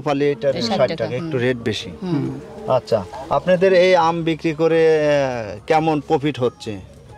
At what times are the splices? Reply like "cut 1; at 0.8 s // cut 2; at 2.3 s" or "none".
none